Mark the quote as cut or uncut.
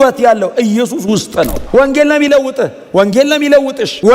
cut